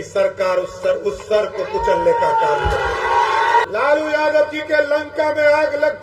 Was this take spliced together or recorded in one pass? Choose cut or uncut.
cut